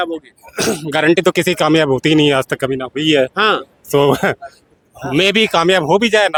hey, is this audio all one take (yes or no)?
yes